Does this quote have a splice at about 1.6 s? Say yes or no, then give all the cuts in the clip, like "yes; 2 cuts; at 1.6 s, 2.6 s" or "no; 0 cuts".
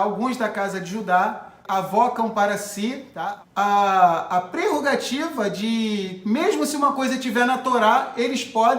yes; 2 cuts; at 1.6 s, 3.1 s